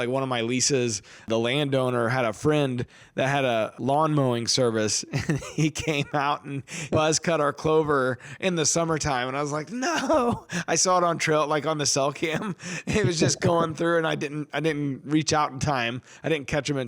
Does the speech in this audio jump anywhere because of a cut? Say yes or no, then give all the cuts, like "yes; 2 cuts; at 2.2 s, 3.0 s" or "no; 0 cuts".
yes; 3 cuts; at 1.3 s, 3.7 s, 6.9 s